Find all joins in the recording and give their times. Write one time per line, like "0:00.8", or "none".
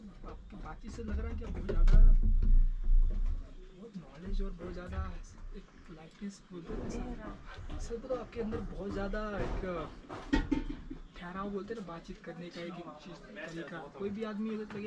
none